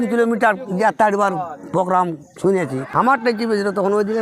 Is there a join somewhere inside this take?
yes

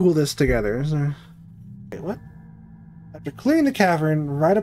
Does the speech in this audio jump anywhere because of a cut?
yes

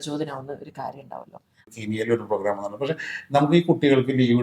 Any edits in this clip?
yes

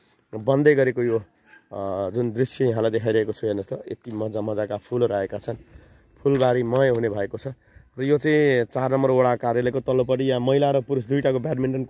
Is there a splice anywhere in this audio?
no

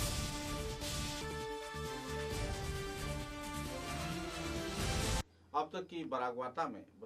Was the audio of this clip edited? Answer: no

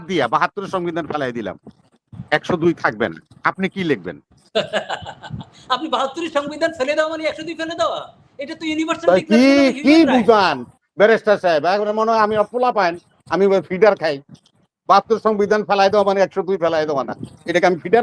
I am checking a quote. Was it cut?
no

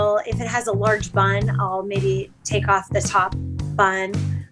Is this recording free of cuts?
yes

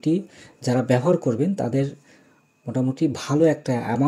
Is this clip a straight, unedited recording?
yes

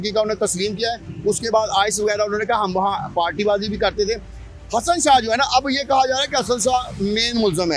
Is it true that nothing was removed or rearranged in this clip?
yes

